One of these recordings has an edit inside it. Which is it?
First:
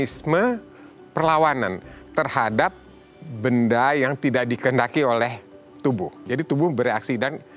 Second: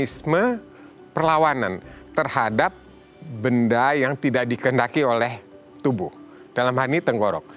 first; 1 cut; at 6.2 s

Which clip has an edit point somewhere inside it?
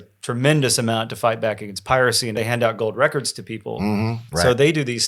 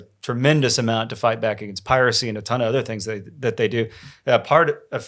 first; 2 cuts; at 2.3 s, 4.2 s

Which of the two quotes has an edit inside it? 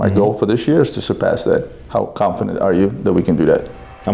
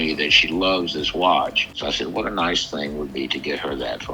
second; 1 cut; at 1.7 s

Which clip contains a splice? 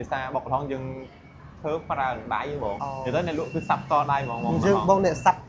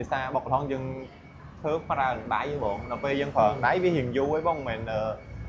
first; 1 cut; at 2.8 s

